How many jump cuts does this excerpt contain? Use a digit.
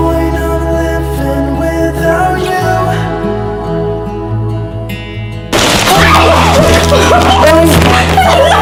0